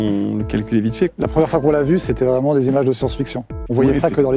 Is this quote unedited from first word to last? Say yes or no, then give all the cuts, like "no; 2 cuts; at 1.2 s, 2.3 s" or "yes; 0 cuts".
no; 1 cut; at 1.1 s